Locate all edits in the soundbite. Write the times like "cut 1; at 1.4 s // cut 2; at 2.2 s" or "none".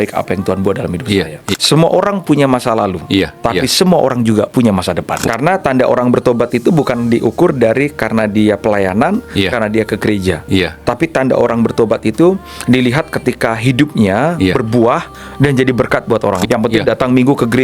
cut 1; at 1.5 s // cut 2; at 5.2 s // cut 3; at 16.5 s